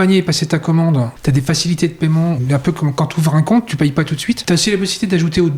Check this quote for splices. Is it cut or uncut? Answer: cut